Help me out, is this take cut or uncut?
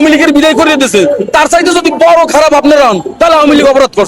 uncut